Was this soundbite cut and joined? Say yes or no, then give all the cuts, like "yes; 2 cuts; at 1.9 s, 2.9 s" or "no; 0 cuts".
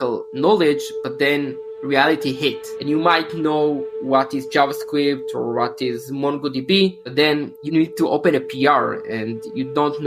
no; 0 cuts